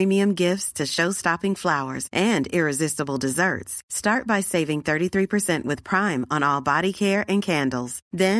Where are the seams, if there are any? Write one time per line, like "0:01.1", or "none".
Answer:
none